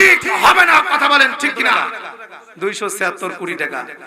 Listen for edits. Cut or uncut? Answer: cut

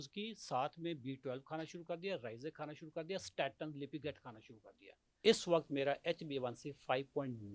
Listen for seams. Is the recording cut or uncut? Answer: cut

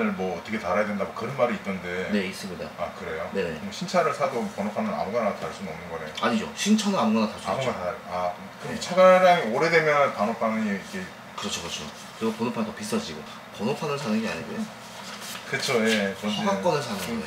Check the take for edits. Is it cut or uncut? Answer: uncut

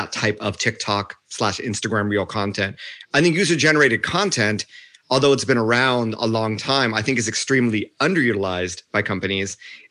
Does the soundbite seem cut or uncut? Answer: uncut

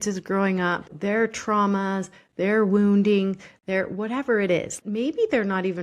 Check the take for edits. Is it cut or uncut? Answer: cut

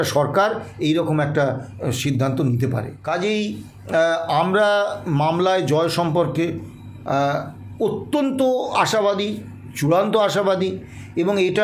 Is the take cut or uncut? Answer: cut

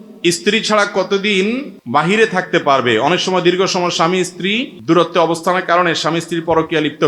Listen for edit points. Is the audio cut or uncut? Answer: cut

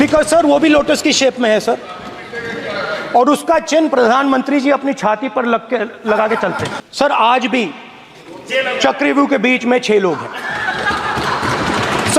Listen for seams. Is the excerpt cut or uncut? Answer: cut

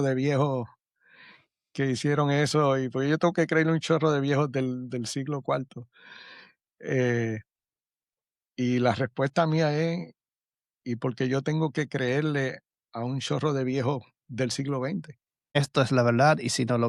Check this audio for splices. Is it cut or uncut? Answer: cut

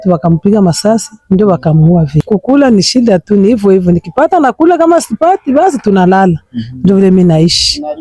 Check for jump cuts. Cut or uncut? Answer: cut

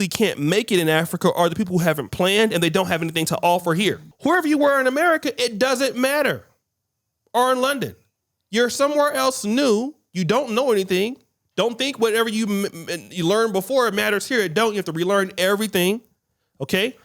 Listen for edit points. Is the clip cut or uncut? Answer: cut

